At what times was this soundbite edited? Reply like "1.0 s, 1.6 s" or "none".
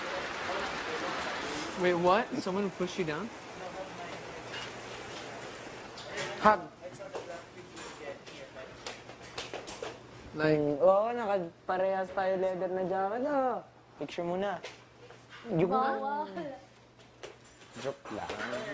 11.2 s